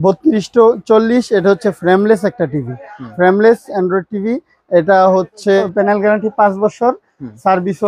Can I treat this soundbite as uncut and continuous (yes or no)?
no